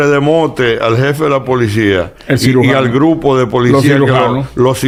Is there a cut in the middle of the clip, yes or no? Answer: no